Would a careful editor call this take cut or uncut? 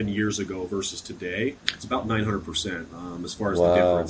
cut